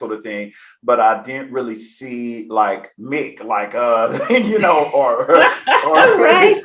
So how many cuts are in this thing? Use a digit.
0